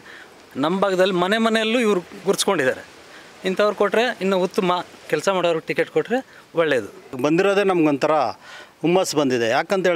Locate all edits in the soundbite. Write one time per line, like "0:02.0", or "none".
0:05.0
0:07.2

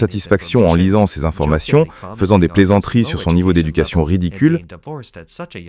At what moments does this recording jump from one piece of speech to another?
none

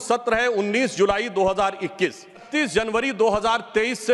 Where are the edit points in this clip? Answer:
0:02.5

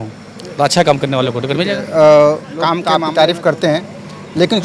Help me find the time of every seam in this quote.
0:02.8

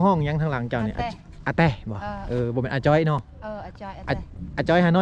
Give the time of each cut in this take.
none

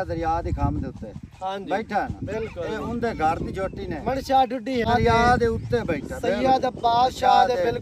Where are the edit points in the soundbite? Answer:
0:04.8

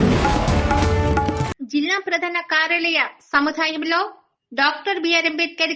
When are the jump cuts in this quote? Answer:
0:01.4

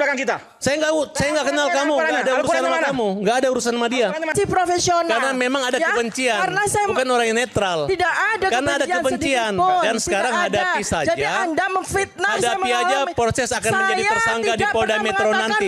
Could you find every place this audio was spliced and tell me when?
0:04.3

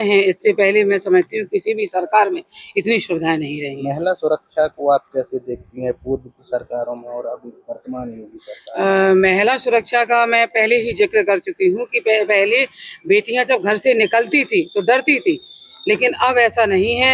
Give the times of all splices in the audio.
none

